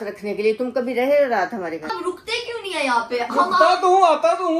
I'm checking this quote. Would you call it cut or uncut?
uncut